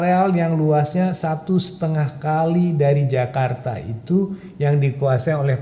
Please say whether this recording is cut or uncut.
uncut